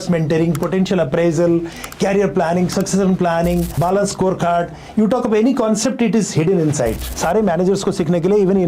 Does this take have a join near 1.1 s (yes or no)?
no